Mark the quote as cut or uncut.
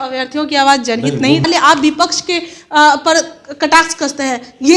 cut